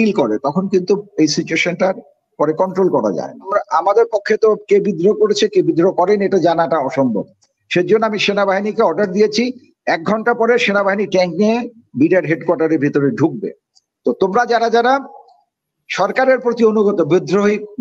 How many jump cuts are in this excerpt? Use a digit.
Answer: 1